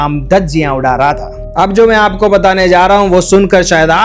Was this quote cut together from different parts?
no; 0 cuts

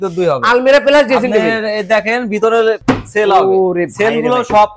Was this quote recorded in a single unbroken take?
no; 1 cut; at 2.8 s

